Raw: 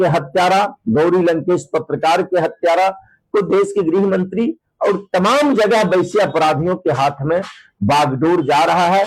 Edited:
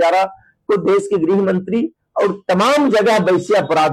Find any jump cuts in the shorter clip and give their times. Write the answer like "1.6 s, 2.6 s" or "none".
none